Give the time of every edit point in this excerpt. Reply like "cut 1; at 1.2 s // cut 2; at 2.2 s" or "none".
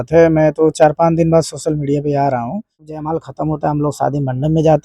cut 1; at 3.0 s